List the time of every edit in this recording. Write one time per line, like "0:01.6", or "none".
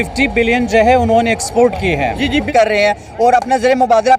0:02.5